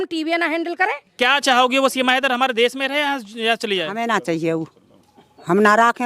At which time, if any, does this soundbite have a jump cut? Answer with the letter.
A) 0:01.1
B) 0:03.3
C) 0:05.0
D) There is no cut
A